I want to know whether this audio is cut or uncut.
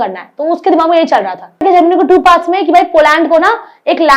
cut